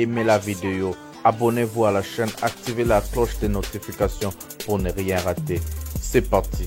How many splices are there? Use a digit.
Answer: 0